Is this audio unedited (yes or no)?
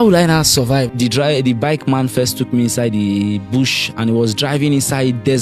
no